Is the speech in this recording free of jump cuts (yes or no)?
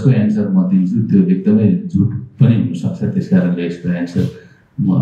yes